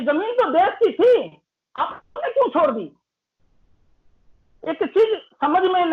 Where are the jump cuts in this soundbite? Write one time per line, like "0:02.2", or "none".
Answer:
none